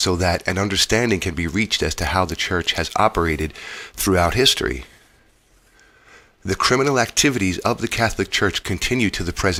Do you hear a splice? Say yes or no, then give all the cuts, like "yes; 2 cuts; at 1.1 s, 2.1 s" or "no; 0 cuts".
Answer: no; 0 cuts